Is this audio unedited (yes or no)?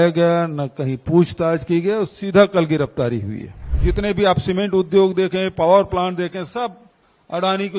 no